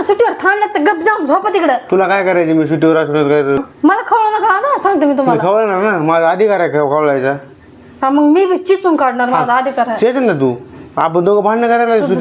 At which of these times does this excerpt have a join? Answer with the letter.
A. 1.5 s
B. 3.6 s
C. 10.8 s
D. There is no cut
B